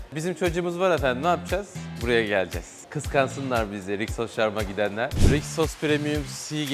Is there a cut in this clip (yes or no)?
yes